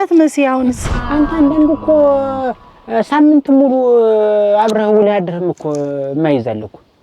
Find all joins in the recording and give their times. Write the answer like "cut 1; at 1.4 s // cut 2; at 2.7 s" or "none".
cut 1; at 0.9 s